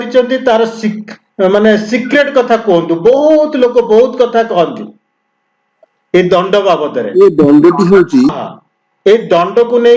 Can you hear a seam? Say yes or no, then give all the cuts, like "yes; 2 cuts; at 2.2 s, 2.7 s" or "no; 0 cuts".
yes; 1 cut; at 8.4 s